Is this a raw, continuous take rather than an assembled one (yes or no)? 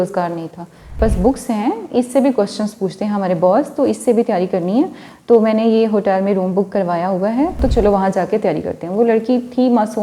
no